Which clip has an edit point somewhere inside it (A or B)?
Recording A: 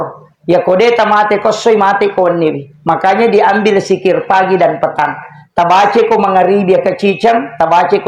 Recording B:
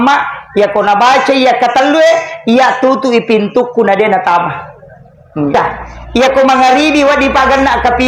B